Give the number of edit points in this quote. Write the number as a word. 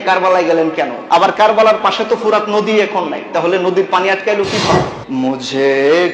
two